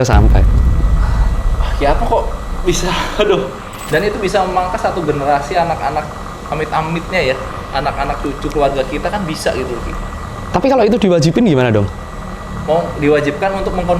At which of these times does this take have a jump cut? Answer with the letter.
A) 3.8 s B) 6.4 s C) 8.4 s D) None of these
A